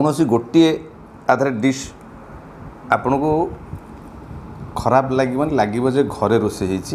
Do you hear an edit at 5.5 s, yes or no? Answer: no